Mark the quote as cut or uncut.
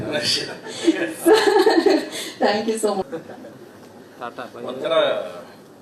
cut